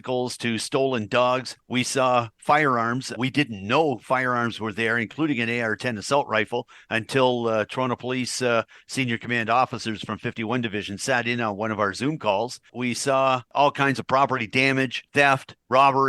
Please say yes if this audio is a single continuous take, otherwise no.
no